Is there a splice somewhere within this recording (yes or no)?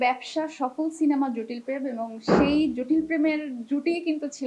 no